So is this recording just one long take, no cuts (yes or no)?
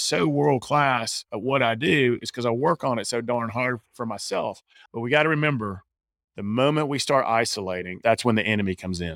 no